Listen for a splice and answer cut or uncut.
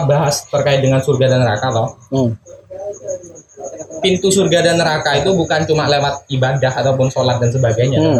uncut